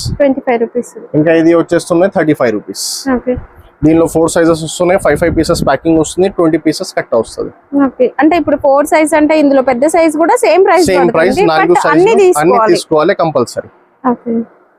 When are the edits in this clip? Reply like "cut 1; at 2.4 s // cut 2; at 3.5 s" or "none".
none